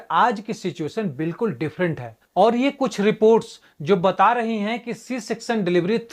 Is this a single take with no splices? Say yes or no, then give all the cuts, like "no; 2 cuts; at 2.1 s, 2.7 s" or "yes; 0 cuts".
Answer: no; 1 cut; at 2.2 s